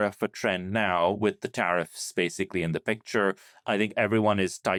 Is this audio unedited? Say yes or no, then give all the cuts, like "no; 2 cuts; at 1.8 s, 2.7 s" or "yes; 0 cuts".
yes; 0 cuts